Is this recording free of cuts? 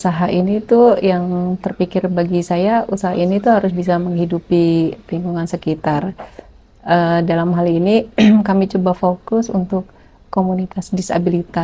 yes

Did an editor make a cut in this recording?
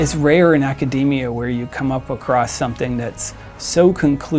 no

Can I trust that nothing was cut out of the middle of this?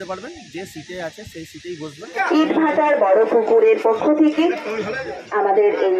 no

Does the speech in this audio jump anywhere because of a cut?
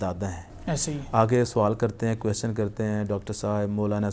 no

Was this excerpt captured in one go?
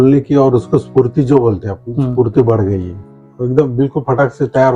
no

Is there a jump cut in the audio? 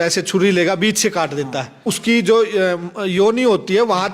yes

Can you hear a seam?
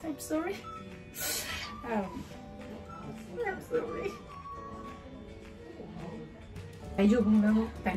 no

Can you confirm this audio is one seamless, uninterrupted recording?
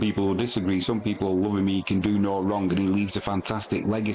yes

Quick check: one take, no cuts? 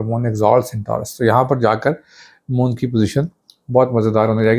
yes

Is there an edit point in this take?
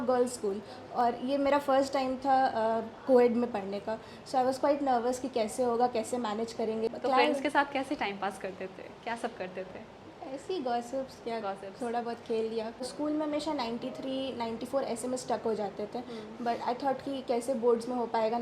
yes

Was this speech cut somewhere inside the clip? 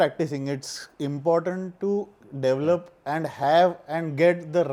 no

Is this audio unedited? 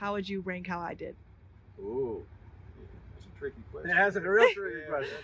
yes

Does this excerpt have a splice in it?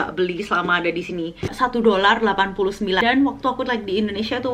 yes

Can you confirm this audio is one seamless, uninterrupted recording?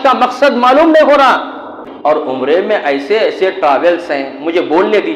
no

